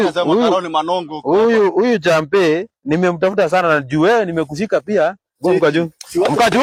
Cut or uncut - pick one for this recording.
uncut